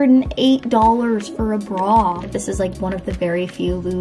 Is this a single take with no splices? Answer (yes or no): no